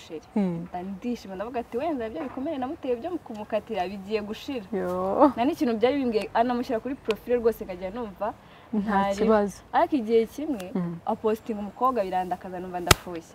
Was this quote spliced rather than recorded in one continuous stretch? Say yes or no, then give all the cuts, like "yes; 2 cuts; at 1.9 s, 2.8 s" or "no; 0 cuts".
no; 0 cuts